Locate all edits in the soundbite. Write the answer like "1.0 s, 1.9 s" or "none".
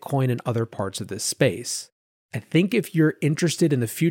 none